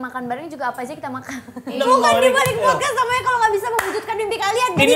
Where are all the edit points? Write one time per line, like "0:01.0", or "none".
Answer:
0:01.7